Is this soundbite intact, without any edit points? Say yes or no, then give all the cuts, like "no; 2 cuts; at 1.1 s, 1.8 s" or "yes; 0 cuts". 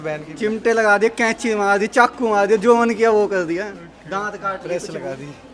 yes; 0 cuts